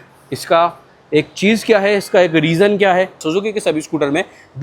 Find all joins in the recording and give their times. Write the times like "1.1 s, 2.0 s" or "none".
3.2 s